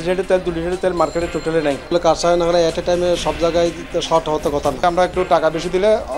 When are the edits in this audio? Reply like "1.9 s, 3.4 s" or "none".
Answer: 1.9 s, 4.8 s